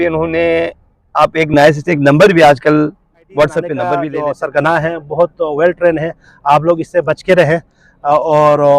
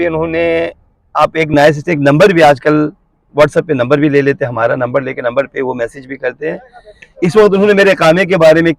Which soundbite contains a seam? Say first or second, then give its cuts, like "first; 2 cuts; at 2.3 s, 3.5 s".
first; 1 cut; at 3.8 s